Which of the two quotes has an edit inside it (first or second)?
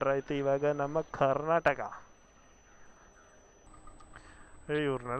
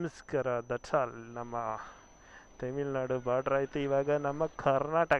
first